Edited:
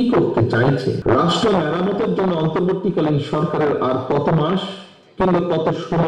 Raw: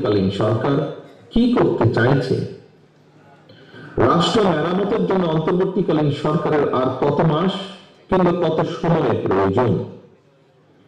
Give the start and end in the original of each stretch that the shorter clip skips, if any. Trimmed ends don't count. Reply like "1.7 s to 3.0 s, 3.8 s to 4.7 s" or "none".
2.4 s to 3.9 s